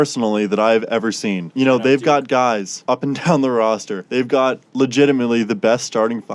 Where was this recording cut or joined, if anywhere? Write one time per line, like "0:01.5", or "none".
0:01.4
0:02.7

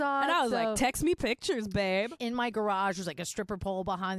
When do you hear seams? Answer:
0:02.1

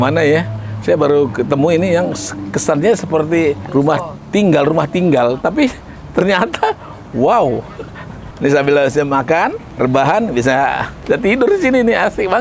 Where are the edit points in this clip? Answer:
0:03.6
0:08.2
0:09.6
0:10.9

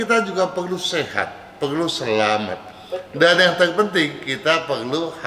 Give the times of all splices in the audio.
none

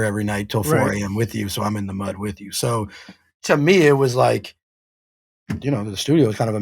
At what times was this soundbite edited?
none

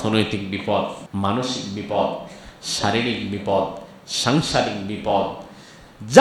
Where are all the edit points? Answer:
0:01.0

